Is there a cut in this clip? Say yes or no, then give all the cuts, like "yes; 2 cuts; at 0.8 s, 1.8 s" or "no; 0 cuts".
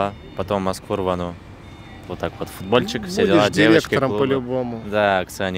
no; 0 cuts